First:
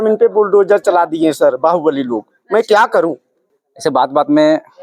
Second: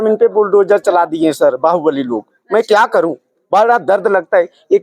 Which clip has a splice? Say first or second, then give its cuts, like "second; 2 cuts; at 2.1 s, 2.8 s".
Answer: first; 1 cut; at 3.3 s